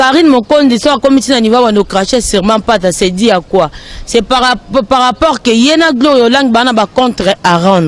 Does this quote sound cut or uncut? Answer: uncut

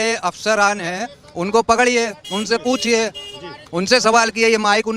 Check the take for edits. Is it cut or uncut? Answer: uncut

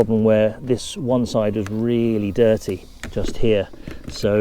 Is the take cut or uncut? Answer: uncut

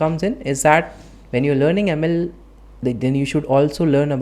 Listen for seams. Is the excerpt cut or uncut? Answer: uncut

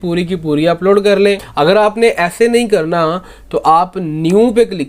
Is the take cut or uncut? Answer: cut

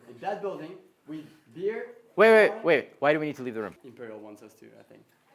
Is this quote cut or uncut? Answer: cut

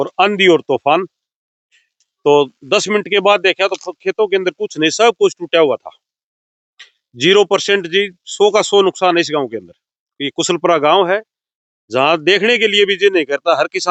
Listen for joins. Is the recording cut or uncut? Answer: uncut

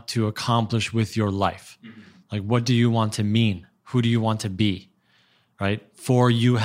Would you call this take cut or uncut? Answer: uncut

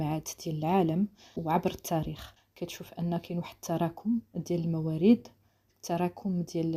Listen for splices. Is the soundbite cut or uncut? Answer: uncut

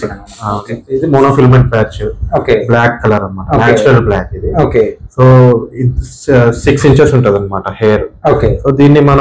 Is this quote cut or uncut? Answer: uncut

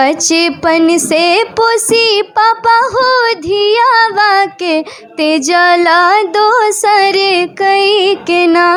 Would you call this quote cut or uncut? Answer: uncut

